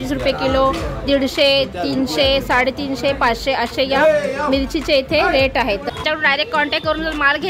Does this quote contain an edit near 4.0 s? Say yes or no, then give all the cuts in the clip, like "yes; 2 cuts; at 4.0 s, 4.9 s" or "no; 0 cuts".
no; 1 cut; at 6.0 s